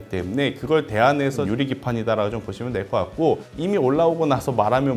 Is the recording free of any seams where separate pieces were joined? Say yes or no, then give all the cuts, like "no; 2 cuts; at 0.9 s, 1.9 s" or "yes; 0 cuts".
no; 2 cuts; at 1.4 s, 3.5 s